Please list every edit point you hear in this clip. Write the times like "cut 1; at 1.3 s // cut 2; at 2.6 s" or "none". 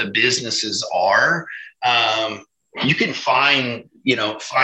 none